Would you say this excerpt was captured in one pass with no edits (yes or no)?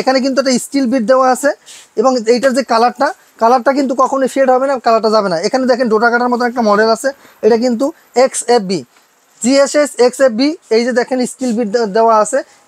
yes